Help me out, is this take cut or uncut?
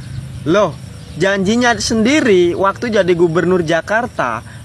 uncut